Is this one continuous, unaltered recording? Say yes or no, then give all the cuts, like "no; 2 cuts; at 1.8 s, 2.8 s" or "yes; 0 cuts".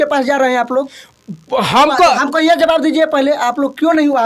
yes; 0 cuts